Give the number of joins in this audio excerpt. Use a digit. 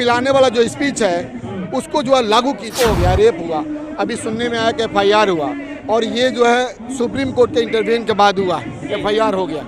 1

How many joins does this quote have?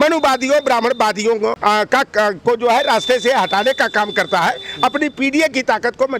1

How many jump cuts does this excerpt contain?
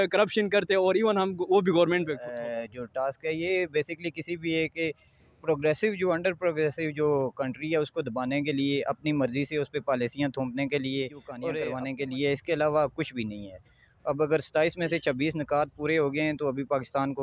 2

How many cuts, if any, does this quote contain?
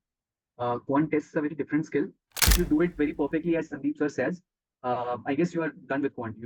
1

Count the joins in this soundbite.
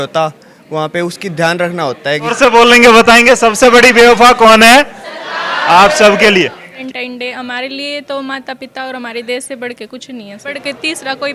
3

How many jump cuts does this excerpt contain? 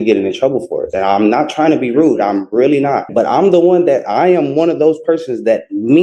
1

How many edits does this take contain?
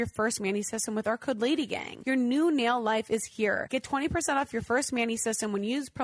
2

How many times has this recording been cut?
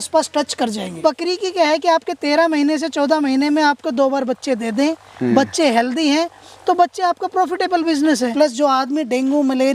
2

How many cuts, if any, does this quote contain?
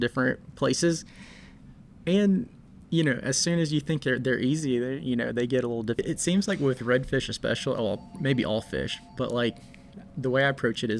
1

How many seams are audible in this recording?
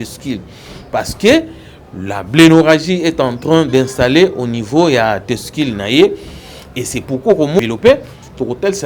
1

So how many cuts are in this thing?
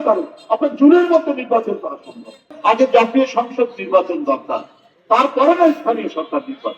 1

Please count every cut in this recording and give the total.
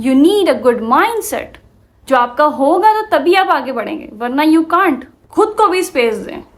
1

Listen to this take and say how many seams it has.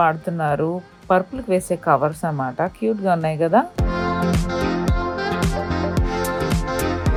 0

